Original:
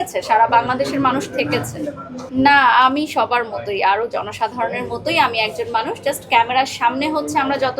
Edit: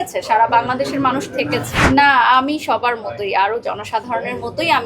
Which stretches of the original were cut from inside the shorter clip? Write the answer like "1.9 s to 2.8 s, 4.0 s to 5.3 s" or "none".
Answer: 1.7 s to 2.2 s